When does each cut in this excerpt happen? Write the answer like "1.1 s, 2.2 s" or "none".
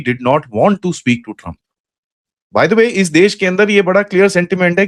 none